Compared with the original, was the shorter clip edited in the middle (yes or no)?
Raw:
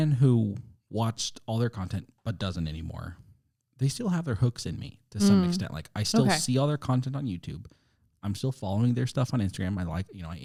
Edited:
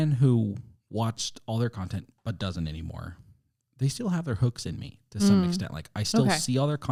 no